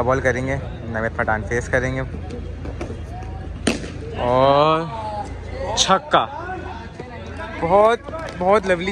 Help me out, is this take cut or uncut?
uncut